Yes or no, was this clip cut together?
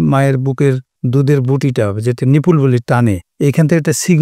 yes